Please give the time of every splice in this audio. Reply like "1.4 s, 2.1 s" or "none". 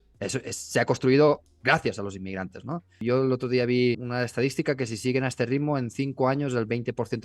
2.9 s, 4.0 s